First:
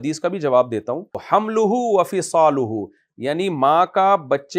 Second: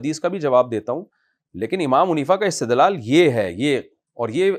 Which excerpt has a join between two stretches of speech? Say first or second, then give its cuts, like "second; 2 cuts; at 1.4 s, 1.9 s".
first; 1 cut; at 1.1 s